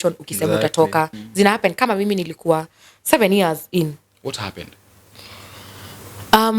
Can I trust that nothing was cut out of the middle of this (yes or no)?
no